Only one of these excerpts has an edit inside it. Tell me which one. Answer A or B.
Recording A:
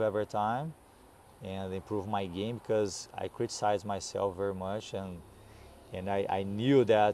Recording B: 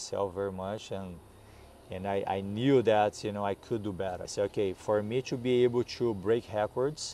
B